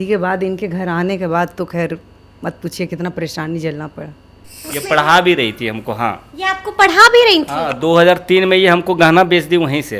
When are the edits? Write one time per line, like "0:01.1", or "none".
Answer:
0:04.7